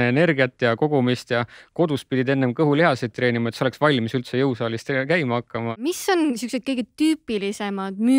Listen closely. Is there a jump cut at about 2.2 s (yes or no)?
no